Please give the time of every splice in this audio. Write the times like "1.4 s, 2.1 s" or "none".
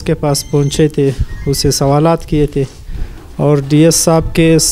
none